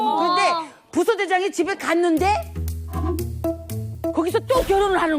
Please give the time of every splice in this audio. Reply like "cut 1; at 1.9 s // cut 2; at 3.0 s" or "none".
cut 1; at 3.8 s